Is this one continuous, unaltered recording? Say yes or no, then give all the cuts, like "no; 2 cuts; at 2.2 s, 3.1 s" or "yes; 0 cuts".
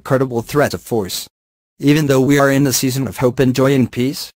no; 2 cuts; at 0.8 s, 1.8 s